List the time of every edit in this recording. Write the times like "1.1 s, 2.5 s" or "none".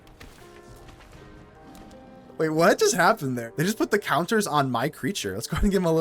3.4 s